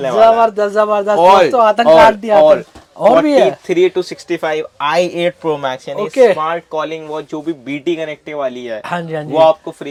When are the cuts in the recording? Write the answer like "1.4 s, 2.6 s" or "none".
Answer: none